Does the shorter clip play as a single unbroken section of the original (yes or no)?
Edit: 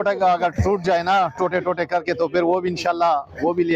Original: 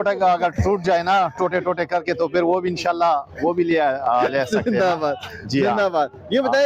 yes